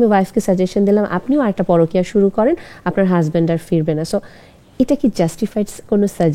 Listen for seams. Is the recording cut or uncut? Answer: uncut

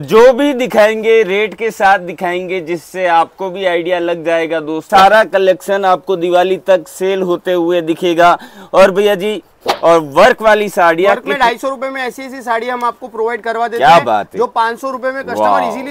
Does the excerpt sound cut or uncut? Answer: cut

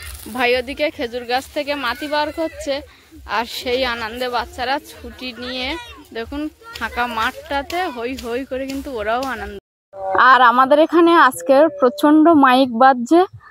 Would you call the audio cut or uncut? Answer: cut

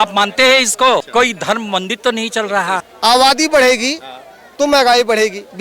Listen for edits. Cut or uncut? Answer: cut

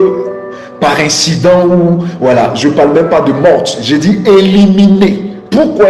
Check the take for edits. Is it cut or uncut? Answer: uncut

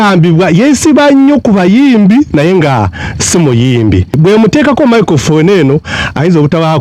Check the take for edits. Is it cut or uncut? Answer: cut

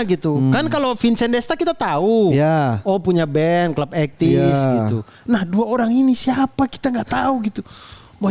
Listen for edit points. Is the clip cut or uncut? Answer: uncut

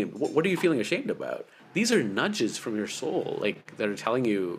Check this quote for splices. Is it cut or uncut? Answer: cut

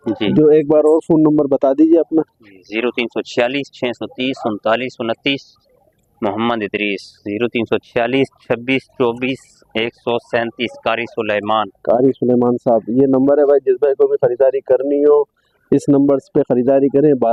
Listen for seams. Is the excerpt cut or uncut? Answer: uncut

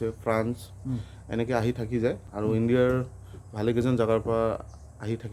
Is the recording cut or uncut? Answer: uncut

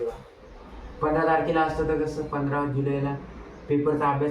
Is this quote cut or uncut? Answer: uncut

